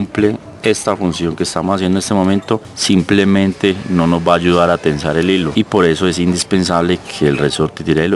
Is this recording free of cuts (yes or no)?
no